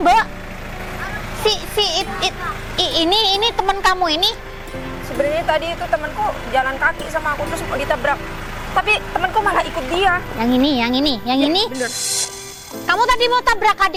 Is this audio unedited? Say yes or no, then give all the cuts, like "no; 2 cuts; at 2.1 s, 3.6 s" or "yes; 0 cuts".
yes; 0 cuts